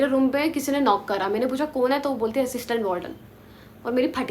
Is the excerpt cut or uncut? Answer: uncut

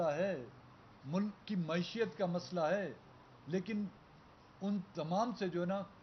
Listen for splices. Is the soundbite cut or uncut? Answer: uncut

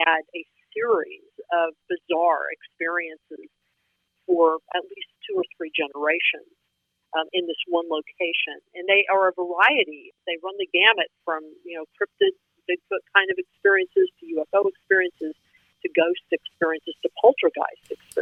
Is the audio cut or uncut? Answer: uncut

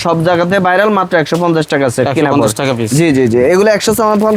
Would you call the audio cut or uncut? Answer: uncut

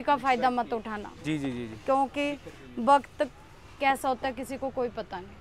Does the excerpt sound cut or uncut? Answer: uncut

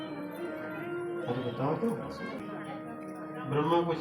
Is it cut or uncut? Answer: cut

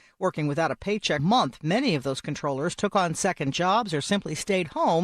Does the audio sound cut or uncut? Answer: cut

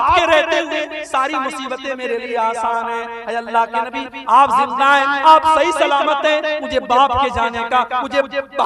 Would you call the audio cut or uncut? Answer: uncut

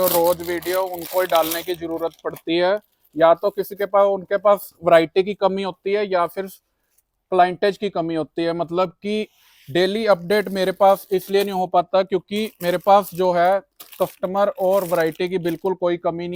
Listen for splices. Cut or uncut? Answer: uncut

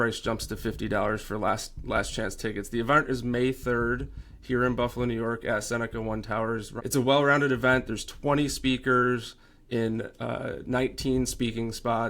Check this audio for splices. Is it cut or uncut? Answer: cut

